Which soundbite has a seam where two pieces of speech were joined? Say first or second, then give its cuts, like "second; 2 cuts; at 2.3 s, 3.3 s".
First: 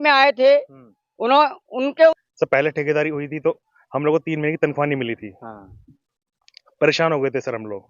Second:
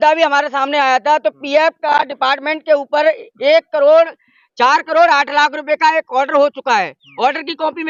first; 1 cut; at 2.1 s